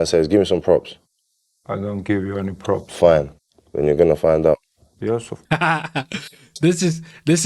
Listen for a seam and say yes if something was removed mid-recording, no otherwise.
yes